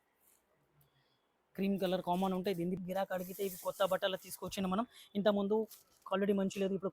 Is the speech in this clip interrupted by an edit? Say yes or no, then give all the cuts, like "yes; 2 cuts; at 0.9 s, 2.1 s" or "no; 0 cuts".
yes; 1 cut; at 2.8 s